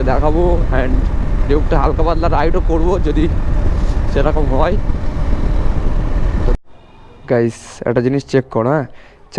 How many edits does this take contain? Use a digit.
1